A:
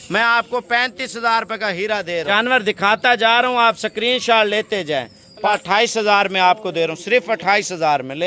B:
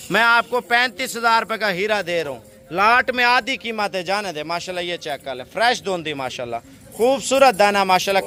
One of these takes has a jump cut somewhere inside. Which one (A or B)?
A